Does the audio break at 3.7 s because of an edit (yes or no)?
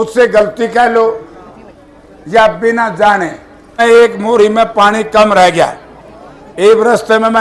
yes